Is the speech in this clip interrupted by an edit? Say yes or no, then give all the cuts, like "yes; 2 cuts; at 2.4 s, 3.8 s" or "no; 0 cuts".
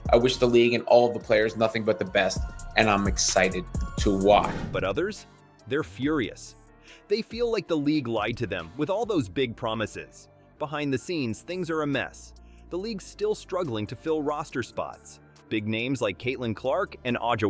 no; 0 cuts